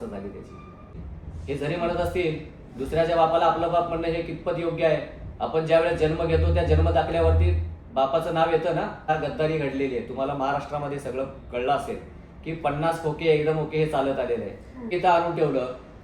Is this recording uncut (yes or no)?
no